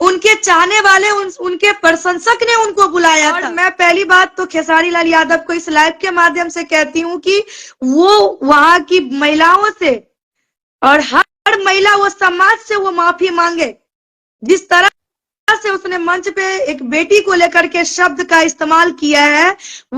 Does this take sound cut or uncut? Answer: cut